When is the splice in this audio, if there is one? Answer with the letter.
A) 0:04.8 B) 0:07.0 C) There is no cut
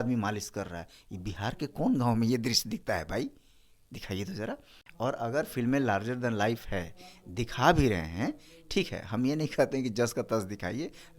C